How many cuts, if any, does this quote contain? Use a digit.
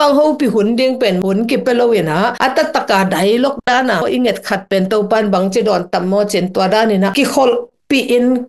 1